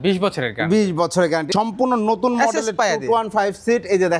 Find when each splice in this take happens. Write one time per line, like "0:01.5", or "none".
0:01.5